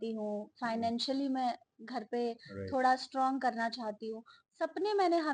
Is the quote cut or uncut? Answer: uncut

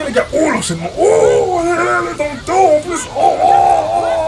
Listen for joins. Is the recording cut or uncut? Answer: uncut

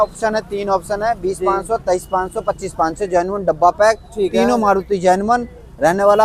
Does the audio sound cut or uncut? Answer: uncut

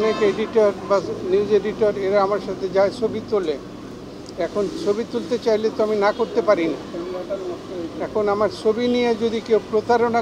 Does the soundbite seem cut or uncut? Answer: uncut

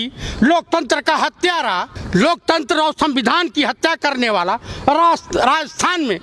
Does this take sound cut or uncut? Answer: cut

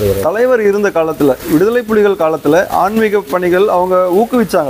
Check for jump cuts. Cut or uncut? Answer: uncut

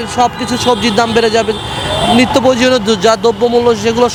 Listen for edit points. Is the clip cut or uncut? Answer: uncut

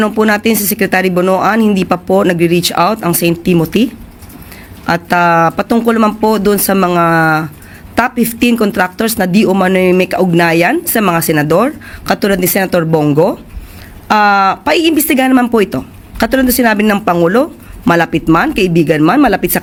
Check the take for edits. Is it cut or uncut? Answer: uncut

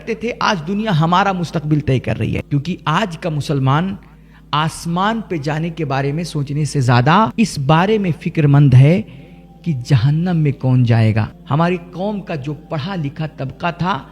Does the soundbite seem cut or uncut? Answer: cut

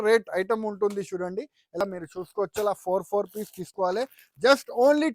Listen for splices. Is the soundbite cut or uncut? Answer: cut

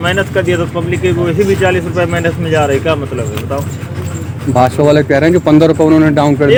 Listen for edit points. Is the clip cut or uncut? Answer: uncut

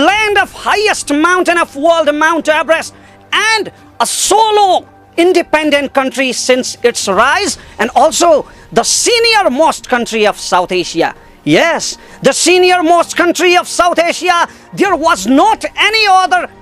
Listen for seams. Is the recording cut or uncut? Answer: uncut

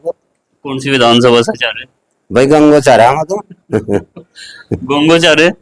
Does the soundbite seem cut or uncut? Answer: uncut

